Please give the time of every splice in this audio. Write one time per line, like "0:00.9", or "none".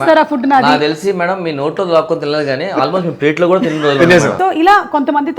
0:04.4